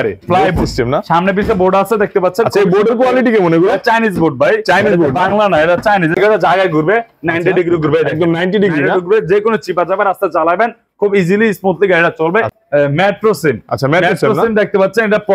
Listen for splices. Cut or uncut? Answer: cut